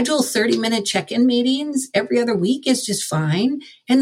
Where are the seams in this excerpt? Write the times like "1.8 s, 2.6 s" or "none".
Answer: none